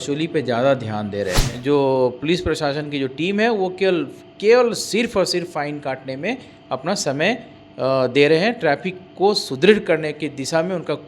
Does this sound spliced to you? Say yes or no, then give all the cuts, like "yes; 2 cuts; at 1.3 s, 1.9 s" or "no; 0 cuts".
yes; 1 cut; at 1.5 s